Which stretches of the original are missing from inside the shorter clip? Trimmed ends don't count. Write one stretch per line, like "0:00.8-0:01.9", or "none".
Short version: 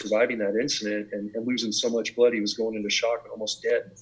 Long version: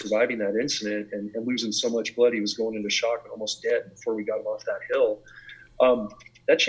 none